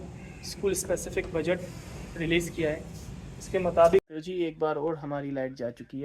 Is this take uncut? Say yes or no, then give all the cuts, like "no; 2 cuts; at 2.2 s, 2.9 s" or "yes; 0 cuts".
no; 1 cut; at 4.0 s